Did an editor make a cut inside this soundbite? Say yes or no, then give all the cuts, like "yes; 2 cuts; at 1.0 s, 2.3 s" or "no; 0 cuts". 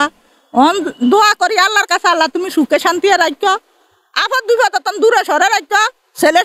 no; 0 cuts